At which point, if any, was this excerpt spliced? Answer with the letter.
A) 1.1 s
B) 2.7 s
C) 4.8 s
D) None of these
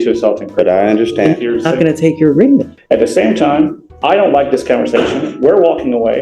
B